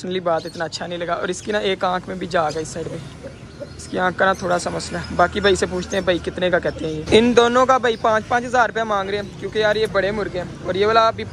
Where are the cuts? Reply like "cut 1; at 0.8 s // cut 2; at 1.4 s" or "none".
cut 1; at 7.0 s